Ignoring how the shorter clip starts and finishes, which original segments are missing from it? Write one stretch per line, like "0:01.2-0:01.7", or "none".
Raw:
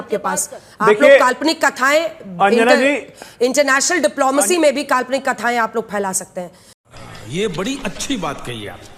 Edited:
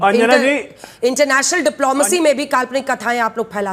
none

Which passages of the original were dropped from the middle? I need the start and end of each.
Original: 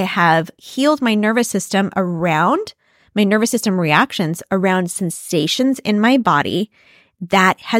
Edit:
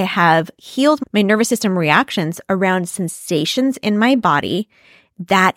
0:01.0-0:03.0

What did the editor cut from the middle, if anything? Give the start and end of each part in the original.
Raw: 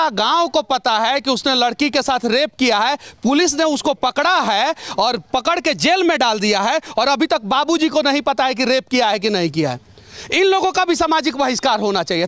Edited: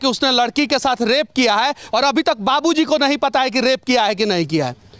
0:03.1-0:06.9

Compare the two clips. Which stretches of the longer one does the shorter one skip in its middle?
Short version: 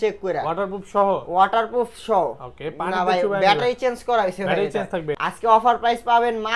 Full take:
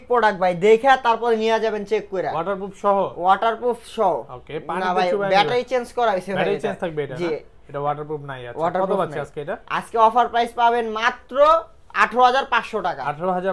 0:07.1-0:09.7

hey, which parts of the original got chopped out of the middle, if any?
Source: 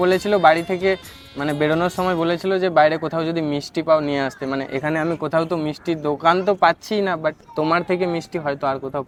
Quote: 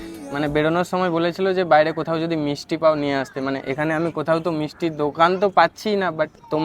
none

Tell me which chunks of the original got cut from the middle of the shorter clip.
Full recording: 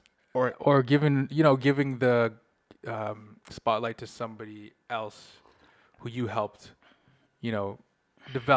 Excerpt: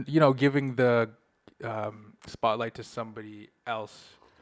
none

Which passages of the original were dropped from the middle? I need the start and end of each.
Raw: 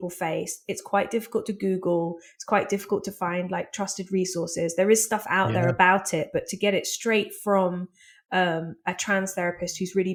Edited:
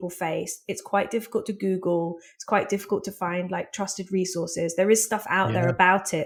none

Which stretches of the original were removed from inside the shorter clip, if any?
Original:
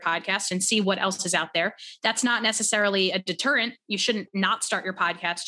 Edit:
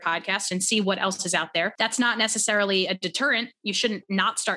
0:01.7-0:02.0

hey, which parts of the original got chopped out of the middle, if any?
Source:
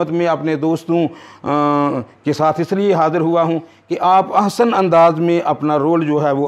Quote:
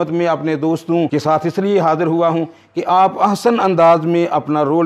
0:01.1-0:02.2

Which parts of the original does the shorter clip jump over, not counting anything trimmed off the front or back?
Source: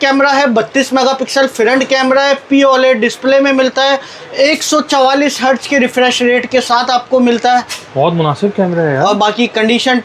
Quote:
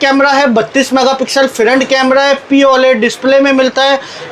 none

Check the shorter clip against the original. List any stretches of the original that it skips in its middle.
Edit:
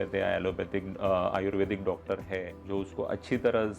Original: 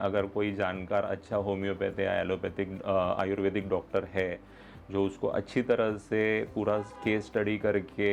0:04.4-0:04.8

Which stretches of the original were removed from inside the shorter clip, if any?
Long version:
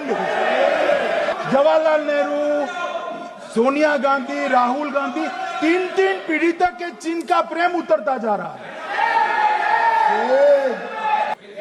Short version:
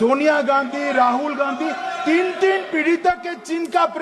none

